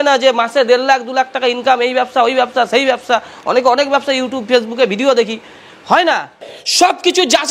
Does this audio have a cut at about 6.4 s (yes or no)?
yes